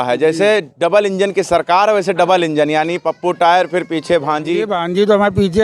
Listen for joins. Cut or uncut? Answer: cut